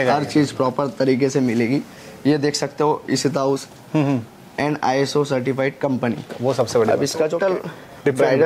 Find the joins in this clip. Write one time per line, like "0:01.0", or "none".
0:07.3